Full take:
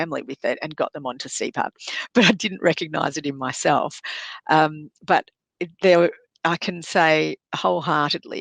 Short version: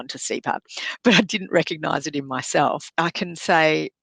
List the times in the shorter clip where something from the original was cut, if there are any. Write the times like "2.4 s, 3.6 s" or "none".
2.9 s